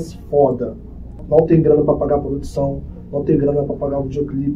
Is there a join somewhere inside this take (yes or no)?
yes